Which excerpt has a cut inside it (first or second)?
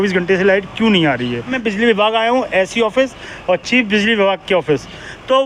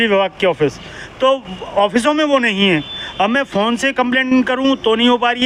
first